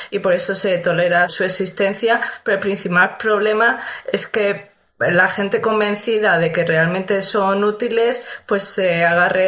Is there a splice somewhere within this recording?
yes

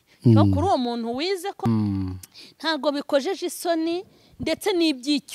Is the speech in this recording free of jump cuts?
no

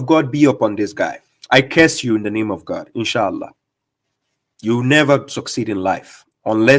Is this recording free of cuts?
no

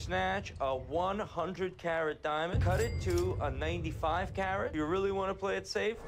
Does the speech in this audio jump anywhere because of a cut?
no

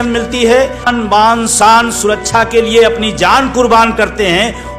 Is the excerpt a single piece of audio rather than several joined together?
no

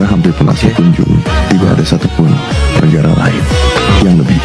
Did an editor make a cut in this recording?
no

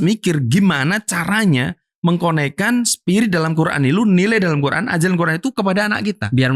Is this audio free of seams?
yes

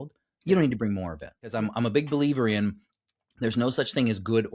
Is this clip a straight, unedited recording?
no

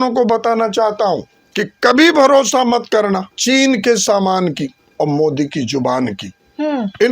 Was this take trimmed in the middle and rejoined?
yes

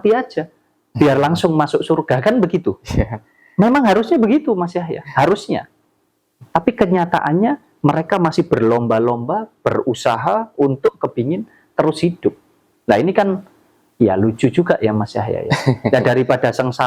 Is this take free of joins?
yes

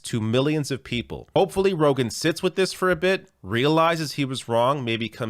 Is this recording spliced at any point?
yes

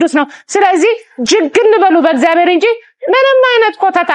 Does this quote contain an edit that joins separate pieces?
no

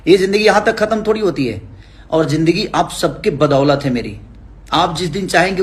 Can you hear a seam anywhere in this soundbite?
no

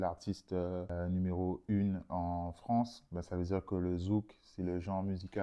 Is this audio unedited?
yes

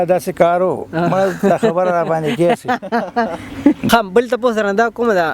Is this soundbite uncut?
no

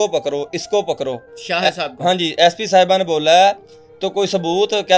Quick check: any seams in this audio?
no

